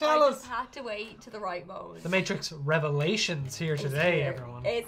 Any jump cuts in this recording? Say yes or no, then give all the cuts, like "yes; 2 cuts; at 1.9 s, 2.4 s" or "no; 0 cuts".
yes; 1 cut; at 1.9 s